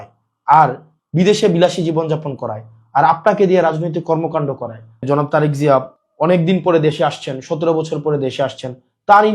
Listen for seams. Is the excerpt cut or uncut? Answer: cut